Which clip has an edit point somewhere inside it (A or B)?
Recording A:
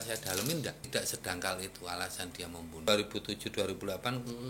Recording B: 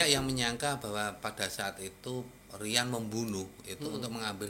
A